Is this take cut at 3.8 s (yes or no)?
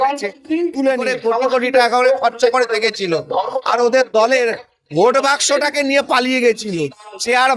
no